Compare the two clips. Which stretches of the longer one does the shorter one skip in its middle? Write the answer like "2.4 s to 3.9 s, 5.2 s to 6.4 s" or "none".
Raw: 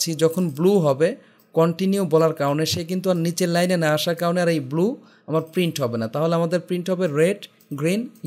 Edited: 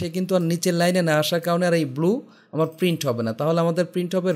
none